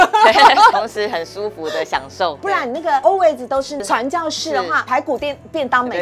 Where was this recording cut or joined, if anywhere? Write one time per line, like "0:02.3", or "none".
0:00.7
0:02.5
0:03.8
0:04.9